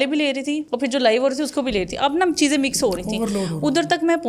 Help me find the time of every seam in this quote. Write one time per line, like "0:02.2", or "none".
none